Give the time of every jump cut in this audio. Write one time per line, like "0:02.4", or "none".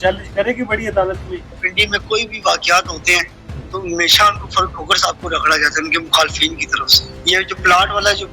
0:01.6
0:07.2